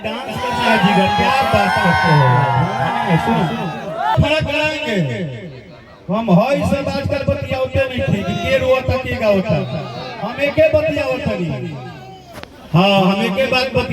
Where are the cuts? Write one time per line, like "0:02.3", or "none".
0:04.2